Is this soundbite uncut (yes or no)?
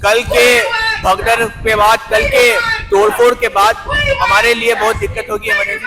yes